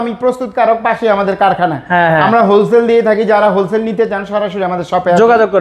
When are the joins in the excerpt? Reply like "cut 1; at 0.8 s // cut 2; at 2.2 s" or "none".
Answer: none